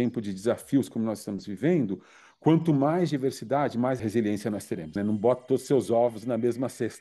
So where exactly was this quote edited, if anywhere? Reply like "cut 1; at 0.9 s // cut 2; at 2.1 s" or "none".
cut 1; at 4.0 s // cut 2; at 5.0 s